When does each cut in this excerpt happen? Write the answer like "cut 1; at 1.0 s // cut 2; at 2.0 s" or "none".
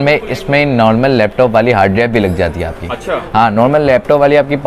none